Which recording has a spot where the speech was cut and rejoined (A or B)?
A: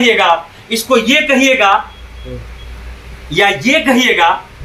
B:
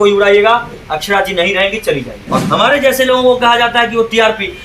B